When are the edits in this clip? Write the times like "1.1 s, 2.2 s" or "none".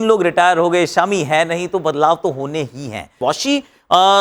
3.2 s